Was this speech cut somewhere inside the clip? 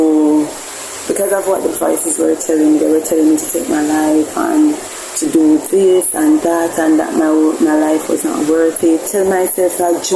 yes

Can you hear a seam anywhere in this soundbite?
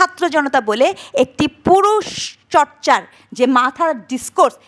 no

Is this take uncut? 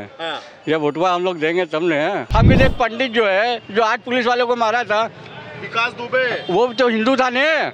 no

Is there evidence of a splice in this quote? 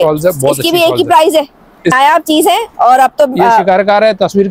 yes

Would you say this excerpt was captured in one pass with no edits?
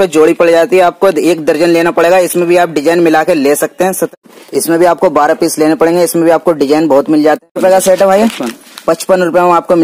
no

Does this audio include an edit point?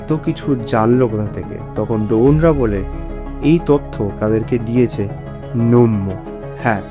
no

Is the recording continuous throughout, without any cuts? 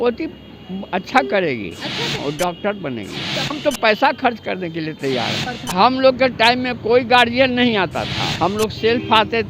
no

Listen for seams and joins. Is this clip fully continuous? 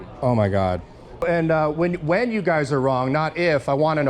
no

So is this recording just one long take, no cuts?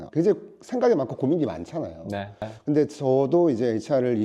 no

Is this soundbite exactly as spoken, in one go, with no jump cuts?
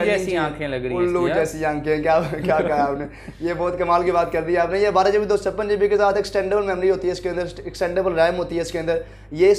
yes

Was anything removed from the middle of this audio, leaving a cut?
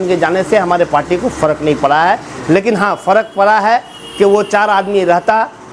no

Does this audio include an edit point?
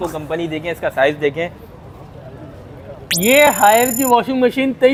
no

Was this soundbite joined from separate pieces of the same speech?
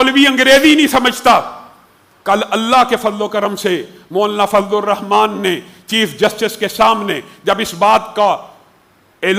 no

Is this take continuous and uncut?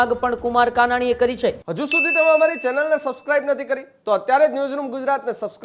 no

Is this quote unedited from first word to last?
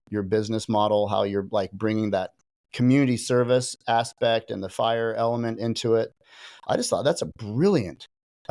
yes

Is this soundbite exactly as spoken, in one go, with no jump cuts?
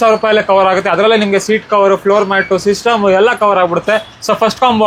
yes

